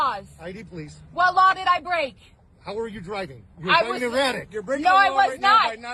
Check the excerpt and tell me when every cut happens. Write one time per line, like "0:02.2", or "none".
0:04.9